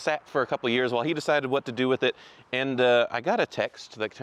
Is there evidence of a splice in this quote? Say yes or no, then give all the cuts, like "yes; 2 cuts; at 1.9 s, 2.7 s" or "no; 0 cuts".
no; 0 cuts